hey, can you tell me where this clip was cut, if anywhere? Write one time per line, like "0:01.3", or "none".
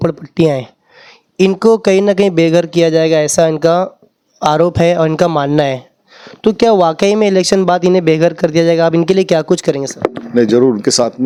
none